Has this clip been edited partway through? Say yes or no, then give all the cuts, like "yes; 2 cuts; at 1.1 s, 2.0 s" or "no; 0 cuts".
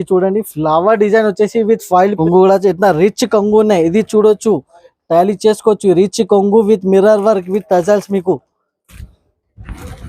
yes; 1 cut; at 2.2 s